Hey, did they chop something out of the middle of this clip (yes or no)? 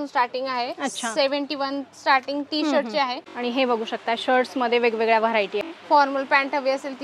yes